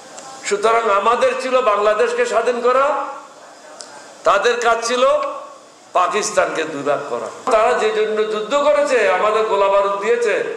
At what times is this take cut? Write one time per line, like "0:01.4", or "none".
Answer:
0:07.5

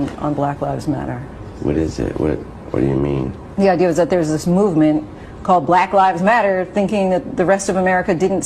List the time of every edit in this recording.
0:04.1

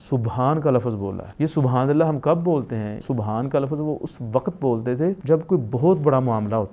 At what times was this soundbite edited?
0:01.2
0:03.0
0:05.2

